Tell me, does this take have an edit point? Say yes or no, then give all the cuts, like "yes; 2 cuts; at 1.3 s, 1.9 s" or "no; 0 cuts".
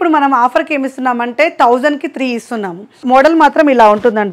yes; 1 cut; at 3.0 s